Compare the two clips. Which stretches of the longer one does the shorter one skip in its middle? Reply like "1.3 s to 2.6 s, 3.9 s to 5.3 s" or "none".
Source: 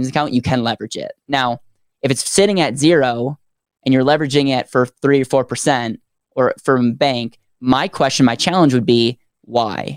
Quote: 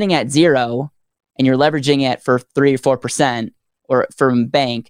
none

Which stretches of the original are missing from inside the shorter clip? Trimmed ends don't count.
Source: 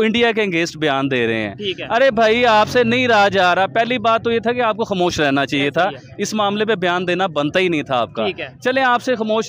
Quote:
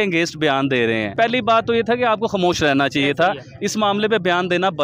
1.5 s to 3.7 s

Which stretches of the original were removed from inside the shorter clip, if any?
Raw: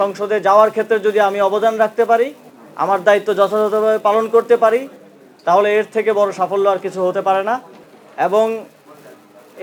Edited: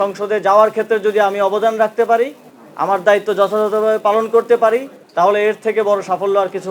5.0 s to 5.3 s

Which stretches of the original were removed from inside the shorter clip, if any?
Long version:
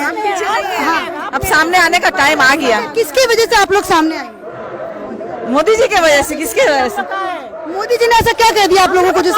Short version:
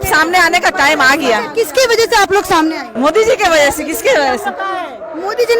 4.3 s to 5.4 s

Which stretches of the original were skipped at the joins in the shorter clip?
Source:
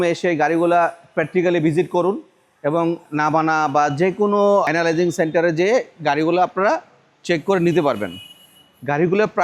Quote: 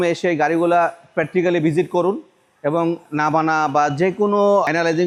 none

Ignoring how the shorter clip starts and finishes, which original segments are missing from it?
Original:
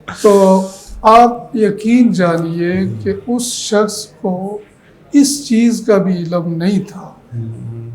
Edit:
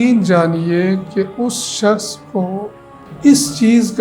none

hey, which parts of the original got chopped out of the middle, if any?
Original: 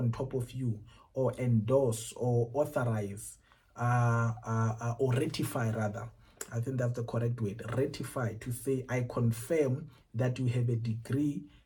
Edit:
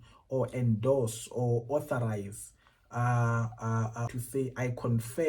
4.9 s to 8.4 s

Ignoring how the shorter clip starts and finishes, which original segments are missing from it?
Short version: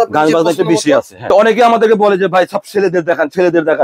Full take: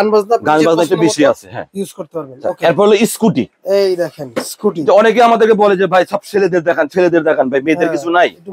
1.5 s to 4.8 s

